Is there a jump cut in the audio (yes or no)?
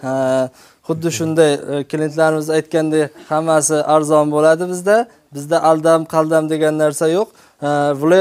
no